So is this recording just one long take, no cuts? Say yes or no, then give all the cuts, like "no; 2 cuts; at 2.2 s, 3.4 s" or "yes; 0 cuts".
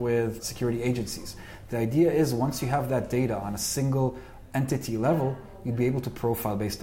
yes; 0 cuts